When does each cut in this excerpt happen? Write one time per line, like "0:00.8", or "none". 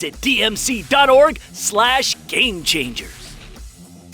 0:03.1